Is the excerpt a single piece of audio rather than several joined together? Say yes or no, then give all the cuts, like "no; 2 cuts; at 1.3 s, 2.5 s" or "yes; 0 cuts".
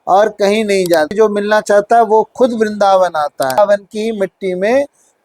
no; 2 cuts; at 1.1 s, 3.6 s